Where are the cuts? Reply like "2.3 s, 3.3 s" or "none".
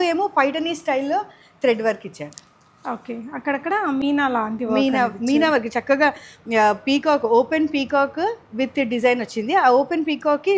none